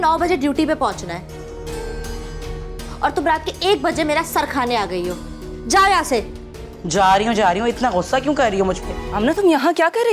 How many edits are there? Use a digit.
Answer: 1